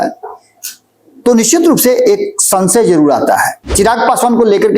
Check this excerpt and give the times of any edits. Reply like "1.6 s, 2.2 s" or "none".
3.6 s